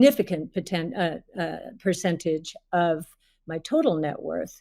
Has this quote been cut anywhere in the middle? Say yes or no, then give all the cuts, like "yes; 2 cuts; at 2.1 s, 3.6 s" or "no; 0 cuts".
no; 0 cuts